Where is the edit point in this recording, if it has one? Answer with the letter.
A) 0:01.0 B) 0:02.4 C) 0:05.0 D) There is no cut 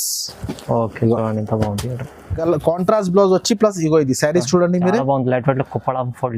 B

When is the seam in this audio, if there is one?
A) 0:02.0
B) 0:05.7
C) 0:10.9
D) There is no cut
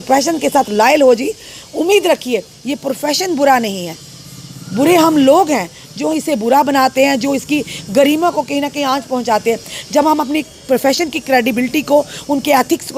D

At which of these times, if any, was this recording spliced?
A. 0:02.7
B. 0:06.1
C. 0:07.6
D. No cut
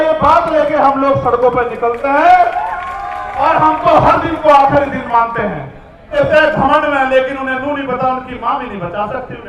B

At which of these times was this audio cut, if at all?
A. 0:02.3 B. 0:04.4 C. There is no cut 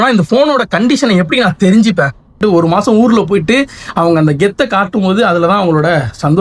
A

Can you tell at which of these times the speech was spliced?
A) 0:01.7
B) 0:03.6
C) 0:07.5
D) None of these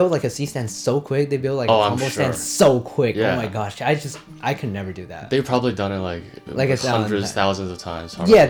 D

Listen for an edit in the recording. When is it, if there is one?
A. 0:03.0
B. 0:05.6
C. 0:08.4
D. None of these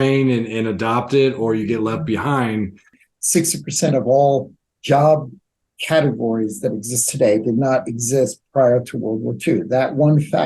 A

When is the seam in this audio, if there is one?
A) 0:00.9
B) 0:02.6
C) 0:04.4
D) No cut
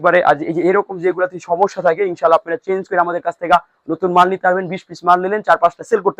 D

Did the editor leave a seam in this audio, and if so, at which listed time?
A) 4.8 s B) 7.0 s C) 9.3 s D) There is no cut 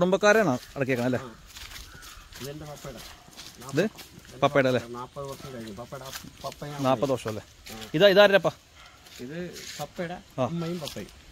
D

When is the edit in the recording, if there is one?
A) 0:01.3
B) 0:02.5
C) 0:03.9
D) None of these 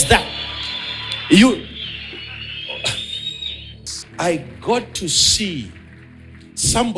C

